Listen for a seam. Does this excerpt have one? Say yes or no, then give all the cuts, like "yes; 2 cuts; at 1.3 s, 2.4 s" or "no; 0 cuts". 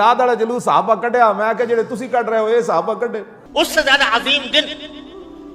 yes; 1 cut; at 3.3 s